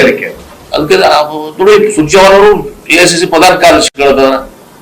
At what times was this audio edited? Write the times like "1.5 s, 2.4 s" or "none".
3.6 s